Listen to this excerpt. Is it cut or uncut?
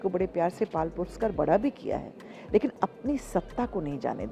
uncut